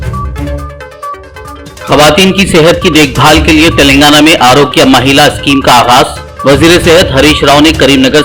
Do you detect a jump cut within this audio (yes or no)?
yes